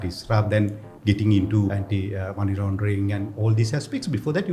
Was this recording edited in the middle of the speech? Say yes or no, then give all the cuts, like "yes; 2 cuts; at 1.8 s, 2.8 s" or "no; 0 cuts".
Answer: yes; 1 cut; at 1.7 s